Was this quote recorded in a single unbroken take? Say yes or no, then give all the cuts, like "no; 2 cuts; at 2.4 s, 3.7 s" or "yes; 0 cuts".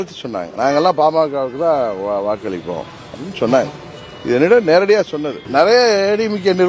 no; 1 cut; at 5.4 s